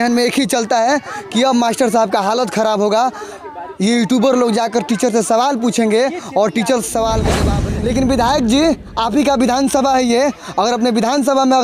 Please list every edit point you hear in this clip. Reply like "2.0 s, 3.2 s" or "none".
7.5 s